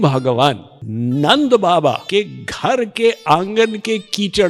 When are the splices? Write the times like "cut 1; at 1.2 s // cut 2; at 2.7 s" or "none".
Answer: none